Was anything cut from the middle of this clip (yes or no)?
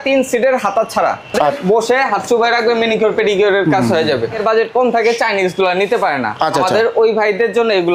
yes